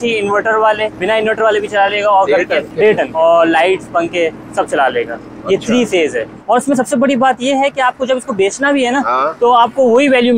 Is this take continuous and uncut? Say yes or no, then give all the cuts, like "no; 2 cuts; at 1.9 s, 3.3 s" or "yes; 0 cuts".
no; 3 cuts; at 1.0 s, 3.0 s, 6.3 s